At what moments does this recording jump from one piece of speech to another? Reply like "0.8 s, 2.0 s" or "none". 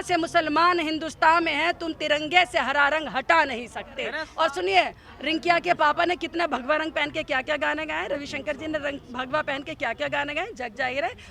4.2 s